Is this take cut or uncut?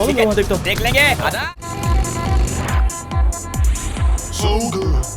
cut